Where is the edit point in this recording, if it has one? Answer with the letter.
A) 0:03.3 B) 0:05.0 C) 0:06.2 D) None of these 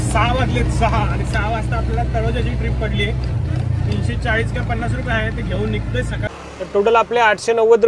C